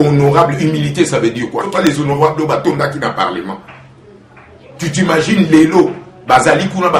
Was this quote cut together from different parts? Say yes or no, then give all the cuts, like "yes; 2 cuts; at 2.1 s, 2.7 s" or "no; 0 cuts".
yes; 1 cut; at 1.7 s